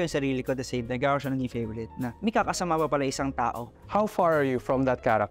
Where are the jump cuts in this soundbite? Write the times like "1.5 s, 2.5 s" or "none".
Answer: none